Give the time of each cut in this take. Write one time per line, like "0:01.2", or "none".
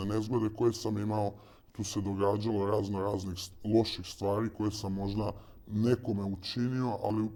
none